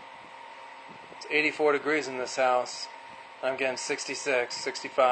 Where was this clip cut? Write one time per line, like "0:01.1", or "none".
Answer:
none